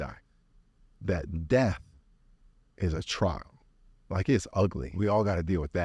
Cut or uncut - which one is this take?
cut